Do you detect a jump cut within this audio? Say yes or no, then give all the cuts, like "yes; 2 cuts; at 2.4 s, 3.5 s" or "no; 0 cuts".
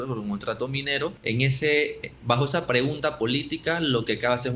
yes; 1 cut; at 1.2 s